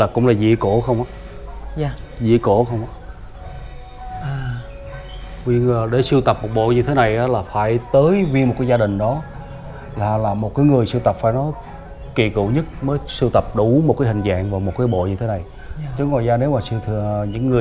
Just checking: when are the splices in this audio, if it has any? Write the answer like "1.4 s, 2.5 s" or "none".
none